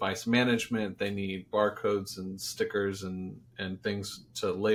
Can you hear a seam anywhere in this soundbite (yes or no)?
no